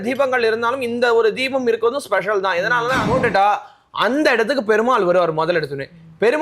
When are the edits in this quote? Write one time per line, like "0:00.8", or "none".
0:03.0